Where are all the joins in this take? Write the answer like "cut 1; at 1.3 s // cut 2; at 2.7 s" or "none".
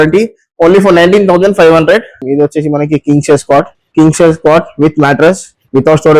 cut 1; at 2.3 s